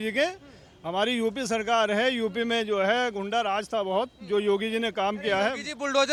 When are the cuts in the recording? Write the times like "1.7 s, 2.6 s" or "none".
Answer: none